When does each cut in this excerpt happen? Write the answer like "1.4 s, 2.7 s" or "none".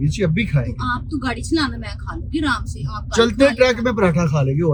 none